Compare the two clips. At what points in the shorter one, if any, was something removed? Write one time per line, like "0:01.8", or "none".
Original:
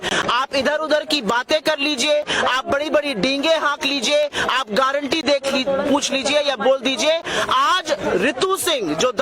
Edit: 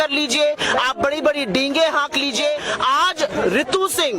0:02.7